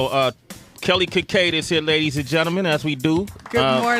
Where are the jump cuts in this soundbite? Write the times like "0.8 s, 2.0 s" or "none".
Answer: 1.0 s